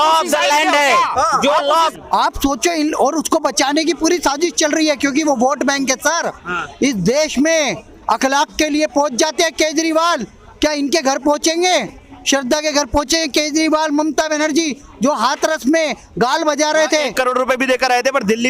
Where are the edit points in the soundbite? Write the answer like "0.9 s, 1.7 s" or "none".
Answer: 1.9 s